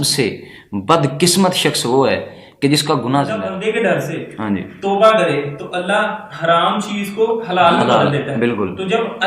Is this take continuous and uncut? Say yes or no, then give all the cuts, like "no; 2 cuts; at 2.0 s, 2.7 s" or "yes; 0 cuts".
no; 1 cut; at 3.5 s